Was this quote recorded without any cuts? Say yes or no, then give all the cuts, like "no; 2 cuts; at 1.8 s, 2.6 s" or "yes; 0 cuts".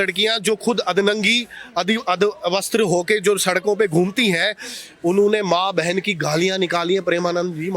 yes; 0 cuts